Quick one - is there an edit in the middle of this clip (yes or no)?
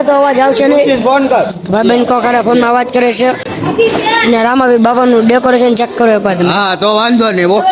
no